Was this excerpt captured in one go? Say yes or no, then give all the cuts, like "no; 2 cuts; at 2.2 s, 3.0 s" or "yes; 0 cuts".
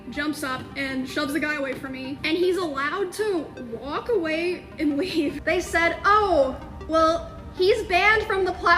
no; 2 cuts; at 2.2 s, 5.4 s